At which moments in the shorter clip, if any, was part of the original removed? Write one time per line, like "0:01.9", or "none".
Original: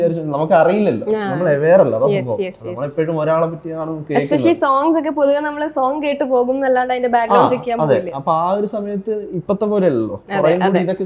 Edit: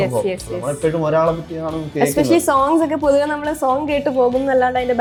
none